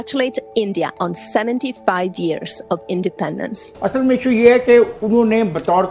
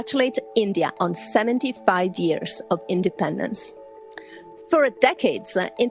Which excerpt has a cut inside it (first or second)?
first